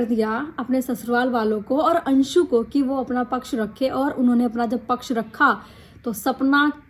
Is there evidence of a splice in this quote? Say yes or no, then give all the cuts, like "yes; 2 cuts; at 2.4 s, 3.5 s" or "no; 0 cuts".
no; 0 cuts